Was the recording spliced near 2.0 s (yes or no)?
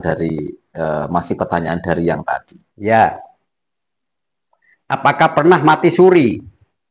no